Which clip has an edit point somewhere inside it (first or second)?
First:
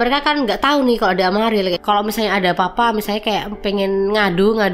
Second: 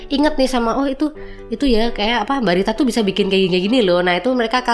first